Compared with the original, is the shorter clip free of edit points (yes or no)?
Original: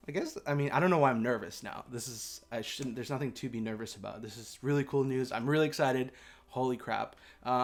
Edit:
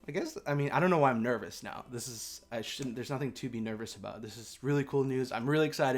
yes